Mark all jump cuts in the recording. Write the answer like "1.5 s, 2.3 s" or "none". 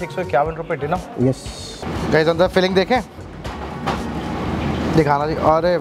1.9 s